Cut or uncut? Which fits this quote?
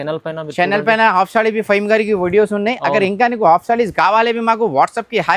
uncut